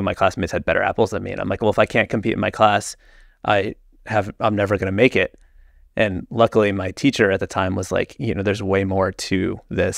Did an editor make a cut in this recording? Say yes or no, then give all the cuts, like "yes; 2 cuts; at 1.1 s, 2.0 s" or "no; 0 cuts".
no; 0 cuts